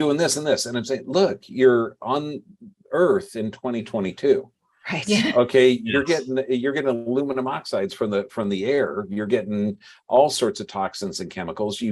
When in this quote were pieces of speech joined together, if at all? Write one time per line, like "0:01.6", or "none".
none

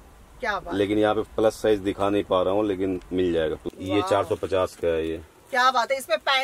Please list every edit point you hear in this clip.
0:03.7

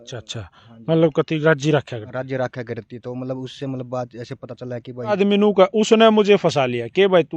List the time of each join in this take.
0:05.2

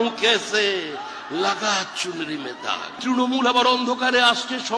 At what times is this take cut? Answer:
0:03.0

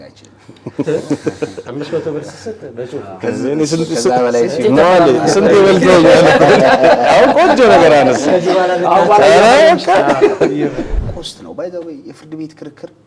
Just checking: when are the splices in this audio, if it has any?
0:11.0

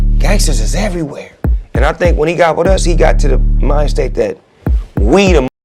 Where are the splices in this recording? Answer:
none

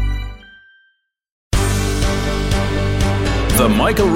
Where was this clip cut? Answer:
0:01.4

